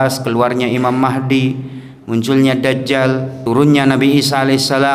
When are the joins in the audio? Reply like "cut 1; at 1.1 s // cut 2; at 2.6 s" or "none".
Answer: cut 1; at 3.3 s